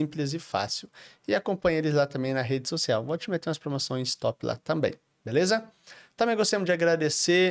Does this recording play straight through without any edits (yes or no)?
yes